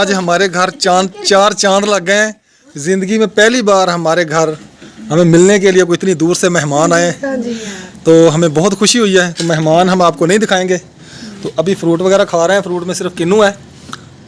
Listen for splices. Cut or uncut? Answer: uncut